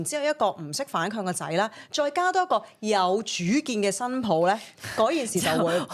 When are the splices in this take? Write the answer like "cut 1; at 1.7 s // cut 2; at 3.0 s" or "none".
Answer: none

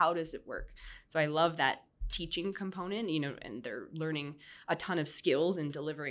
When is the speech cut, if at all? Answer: none

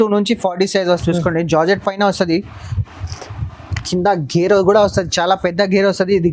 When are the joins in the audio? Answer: cut 1; at 1.0 s

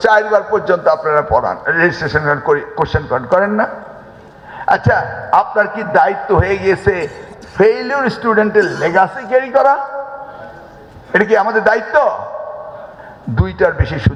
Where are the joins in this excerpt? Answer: none

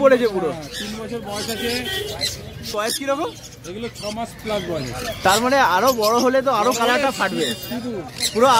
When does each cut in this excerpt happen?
cut 1; at 2.7 s

